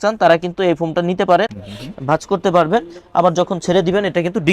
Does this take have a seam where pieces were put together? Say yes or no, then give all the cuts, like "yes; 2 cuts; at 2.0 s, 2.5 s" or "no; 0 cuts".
yes; 1 cut; at 1.5 s